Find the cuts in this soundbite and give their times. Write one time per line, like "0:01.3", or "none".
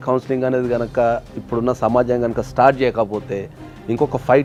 none